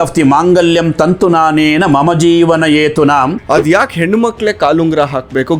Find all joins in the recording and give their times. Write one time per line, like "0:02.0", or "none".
0:03.4